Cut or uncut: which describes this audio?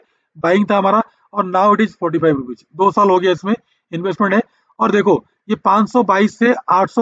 uncut